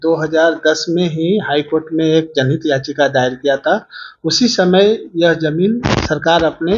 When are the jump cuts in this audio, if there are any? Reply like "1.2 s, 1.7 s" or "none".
none